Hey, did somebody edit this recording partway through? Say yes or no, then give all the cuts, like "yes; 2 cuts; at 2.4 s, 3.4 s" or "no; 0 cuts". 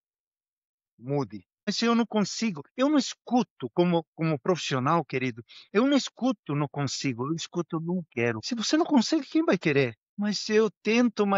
yes; 3 cuts; at 1.7 s, 8.4 s, 10.1 s